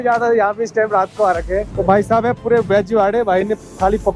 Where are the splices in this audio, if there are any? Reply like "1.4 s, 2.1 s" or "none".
1.7 s